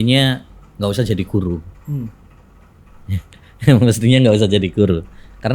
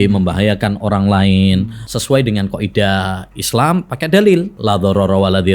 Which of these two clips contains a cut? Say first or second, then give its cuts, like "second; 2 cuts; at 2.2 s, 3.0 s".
second; 2 cuts; at 1.8 s, 4.5 s